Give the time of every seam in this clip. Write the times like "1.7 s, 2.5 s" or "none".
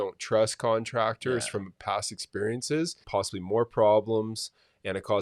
3.0 s